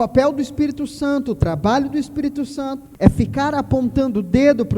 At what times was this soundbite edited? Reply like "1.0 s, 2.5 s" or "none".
2.8 s